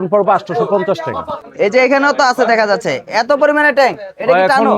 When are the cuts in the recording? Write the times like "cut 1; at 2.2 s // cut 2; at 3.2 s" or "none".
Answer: cut 1; at 1.7 s